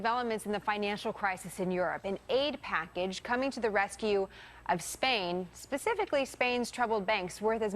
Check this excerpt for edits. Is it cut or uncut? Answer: cut